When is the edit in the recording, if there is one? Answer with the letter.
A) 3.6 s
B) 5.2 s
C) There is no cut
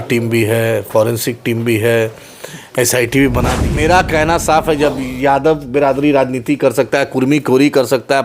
A